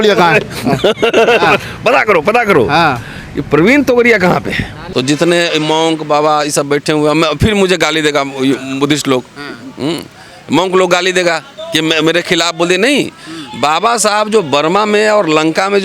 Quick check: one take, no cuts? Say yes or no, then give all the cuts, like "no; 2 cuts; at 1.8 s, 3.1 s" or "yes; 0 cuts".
no; 1 cut; at 4.7 s